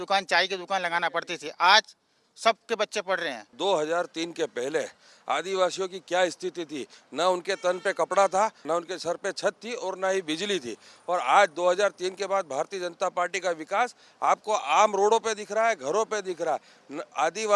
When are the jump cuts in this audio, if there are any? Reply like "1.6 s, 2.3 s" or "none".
3.5 s